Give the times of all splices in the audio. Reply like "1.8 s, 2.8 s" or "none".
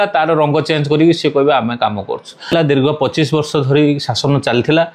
2.5 s